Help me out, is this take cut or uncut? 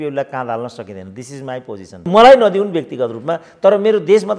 cut